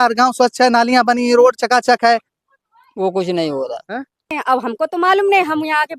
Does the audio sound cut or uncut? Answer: cut